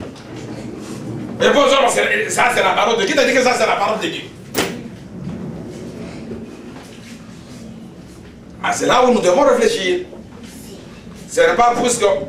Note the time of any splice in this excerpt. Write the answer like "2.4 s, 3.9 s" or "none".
none